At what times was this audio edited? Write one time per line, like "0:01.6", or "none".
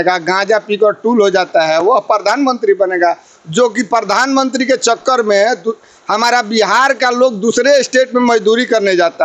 none